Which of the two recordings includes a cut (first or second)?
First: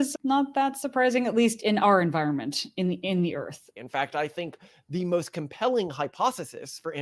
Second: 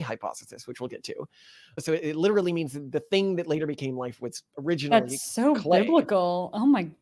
first